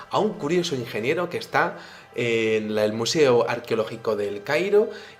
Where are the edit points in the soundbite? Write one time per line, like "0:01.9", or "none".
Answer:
none